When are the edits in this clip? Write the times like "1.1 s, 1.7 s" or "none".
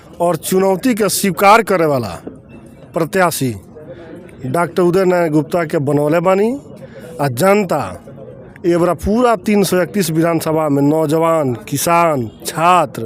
none